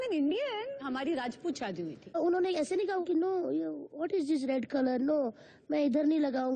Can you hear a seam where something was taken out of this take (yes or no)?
yes